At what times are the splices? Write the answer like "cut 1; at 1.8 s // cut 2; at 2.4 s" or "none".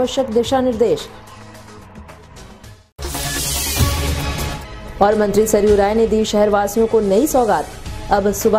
none